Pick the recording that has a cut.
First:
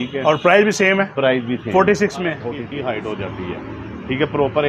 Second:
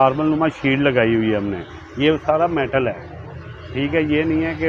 first; 1 cut; at 2.6 s

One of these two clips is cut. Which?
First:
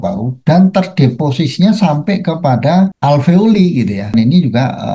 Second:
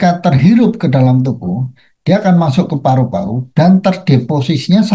first; 2 cuts; at 3.0 s, 4.1 s

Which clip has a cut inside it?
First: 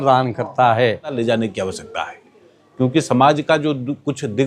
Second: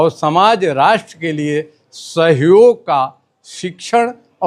first; 1 cut; at 1.2 s

